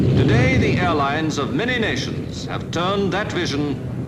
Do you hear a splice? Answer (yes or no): yes